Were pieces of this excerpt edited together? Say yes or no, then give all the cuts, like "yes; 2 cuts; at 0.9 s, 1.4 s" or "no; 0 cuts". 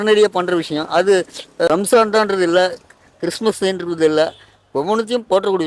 yes; 1 cut; at 1.7 s